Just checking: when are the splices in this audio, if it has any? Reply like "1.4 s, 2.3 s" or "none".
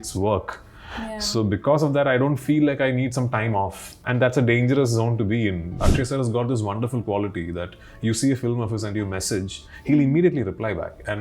5.8 s